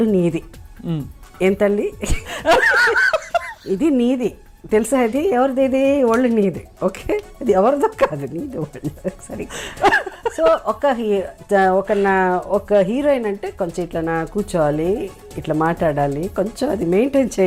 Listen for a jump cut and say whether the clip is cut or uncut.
uncut